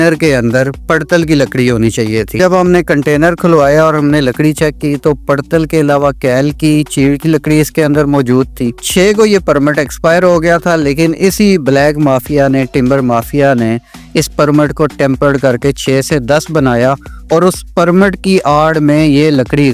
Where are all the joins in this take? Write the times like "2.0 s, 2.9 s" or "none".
2.4 s, 8.8 s